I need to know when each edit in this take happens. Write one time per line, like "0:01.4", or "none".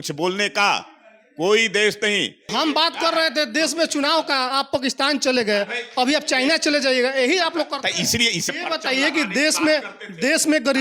0:02.5
0:08.4